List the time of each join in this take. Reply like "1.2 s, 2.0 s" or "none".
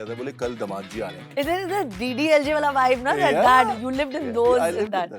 1.2 s